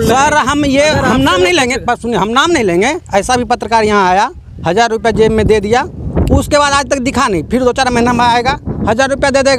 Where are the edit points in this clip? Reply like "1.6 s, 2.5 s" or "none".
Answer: none